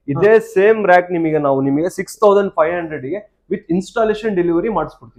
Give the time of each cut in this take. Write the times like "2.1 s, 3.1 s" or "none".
none